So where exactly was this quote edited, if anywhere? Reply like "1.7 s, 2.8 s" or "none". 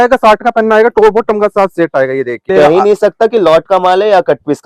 2.5 s